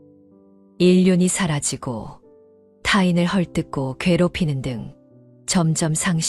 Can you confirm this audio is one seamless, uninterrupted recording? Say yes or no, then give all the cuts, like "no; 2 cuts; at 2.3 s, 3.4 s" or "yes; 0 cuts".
yes; 0 cuts